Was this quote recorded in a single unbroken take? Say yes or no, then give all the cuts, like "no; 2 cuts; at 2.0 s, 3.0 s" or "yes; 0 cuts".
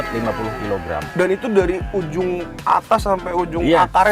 no; 2 cuts; at 1.1 s, 2.5 s